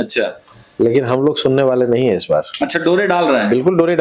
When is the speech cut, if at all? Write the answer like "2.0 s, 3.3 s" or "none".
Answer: none